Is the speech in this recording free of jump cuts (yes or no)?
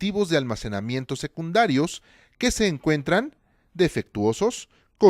yes